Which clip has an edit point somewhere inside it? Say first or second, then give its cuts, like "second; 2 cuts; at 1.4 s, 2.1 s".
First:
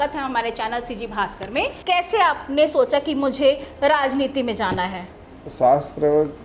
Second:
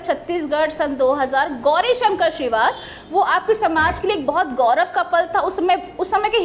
first; 2 cuts; at 1.8 s, 5.4 s